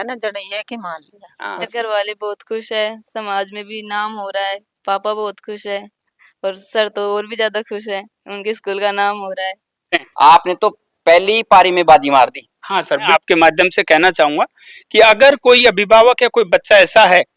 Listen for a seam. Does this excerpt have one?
yes; 3 cuts; at 1.7 s, 10.1 s, 13.0 s

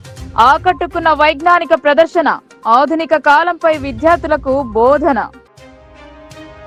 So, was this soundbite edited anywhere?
no; 0 cuts

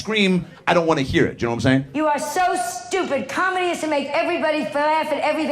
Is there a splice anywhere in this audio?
yes; 1 cut; at 1.9 s

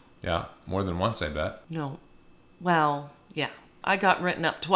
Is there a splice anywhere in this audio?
yes; 2 cuts; at 1.6 s, 3.7 s

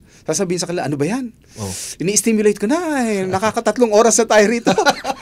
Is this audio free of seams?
yes; 0 cuts

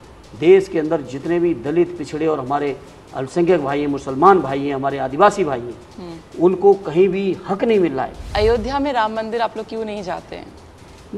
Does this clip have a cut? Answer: yes; 1 cut; at 8.2 s

